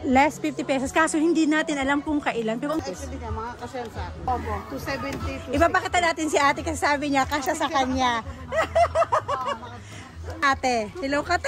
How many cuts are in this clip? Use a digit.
3